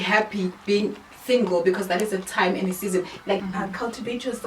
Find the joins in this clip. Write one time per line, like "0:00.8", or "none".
0:03.5